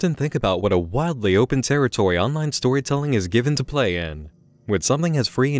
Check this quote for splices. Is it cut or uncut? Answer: uncut